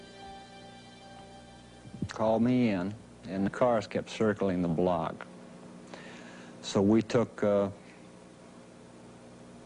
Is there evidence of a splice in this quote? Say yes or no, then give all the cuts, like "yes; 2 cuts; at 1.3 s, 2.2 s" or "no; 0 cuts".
no; 0 cuts